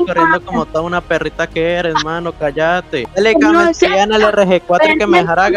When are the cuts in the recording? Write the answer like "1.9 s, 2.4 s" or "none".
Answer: 3.0 s